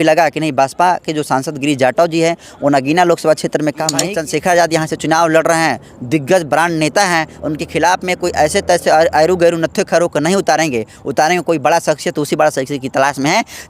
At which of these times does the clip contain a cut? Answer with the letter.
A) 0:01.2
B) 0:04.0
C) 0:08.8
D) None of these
B